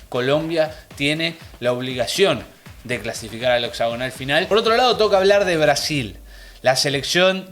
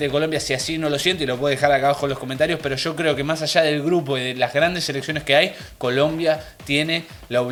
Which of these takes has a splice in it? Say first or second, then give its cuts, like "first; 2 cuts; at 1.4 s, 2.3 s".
first; 1 cut; at 4.5 s